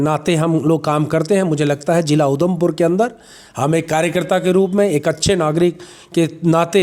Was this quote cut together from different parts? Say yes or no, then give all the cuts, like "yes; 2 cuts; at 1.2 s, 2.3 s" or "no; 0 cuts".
no; 0 cuts